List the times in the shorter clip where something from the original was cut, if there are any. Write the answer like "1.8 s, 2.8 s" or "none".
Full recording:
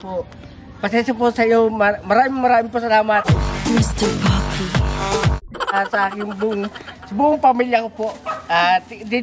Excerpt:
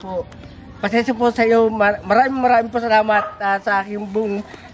3.2 s